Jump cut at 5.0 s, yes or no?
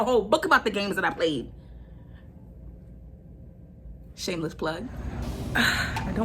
yes